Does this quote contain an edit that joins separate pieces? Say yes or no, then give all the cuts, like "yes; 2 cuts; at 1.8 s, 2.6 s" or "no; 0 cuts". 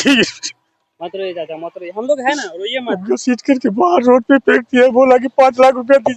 no; 0 cuts